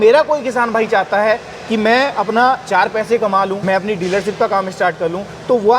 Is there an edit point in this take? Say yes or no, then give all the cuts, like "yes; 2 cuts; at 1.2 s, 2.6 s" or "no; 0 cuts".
yes; 1 cut; at 3.6 s